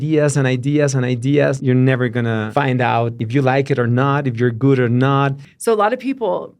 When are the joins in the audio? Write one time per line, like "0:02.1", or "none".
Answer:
0:01.6
0:02.5
0:03.2
0:05.5